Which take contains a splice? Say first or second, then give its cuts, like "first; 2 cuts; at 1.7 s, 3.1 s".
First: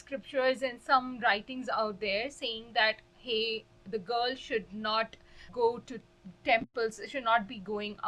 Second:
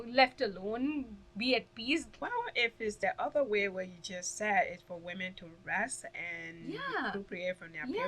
second; 1 cut; at 2.3 s